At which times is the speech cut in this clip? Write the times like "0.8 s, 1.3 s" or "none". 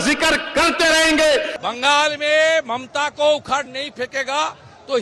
1.6 s